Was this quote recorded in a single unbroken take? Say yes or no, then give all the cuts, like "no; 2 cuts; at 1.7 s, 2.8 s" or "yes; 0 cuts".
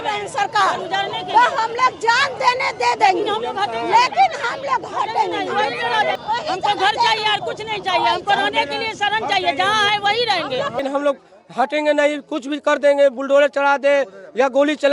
no; 2 cuts; at 6.2 s, 10.8 s